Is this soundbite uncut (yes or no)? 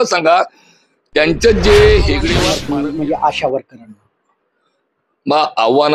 no